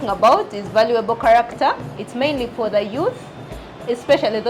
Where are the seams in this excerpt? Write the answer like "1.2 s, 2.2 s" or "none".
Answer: 2.0 s